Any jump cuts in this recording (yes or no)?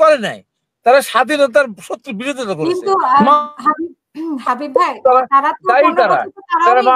no